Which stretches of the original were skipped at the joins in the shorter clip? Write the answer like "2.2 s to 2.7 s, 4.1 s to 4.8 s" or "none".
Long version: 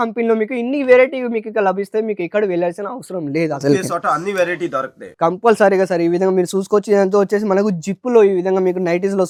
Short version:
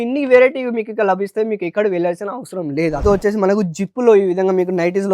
3.6 s to 7.1 s

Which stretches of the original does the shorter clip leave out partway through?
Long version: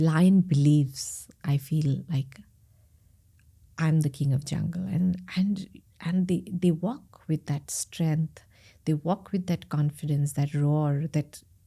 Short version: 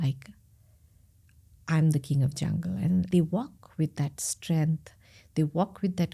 5.2 s to 6.6 s

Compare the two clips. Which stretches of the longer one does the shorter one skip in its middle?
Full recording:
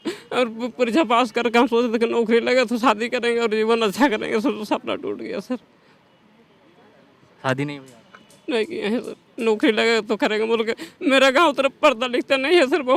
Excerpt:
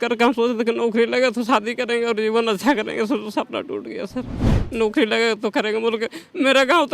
5.9 s to 9.2 s

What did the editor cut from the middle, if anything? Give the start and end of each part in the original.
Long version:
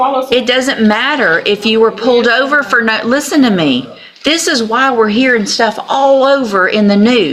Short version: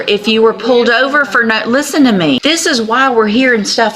3.8 s to 4.2 s

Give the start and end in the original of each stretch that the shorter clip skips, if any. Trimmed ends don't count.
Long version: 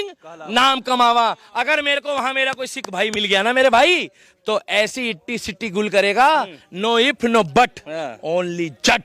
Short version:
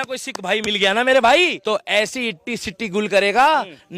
4.1 s to 4.4 s

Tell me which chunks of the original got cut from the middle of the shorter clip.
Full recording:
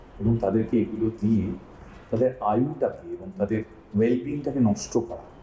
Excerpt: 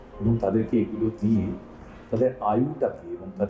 none

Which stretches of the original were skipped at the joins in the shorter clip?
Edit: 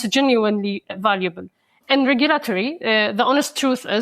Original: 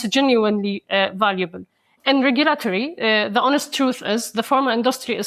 0.9 s to 1.1 s

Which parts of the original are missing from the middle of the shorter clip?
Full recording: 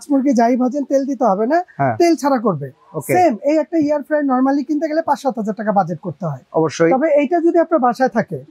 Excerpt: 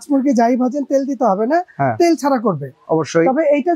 2.7 s to 6.4 s

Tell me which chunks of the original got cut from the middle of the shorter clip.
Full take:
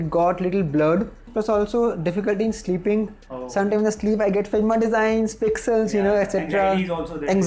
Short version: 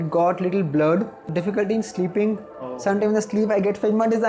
1.3 s to 2.0 s

